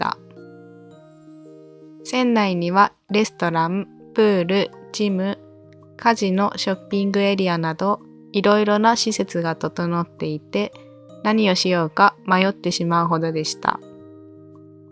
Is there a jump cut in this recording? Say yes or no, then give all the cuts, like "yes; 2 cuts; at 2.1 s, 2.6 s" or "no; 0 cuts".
yes; 1 cut; at 13.8 s